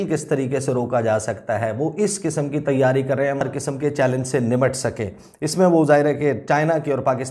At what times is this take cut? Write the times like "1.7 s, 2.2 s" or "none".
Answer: 3.4 s